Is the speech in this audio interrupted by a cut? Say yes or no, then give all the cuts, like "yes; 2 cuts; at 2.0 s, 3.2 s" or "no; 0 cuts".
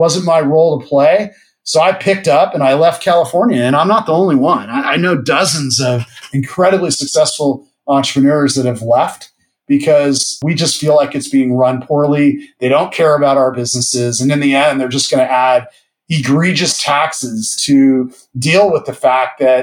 no; 0 cuts